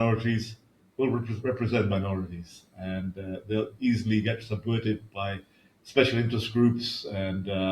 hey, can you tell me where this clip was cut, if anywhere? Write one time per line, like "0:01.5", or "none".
none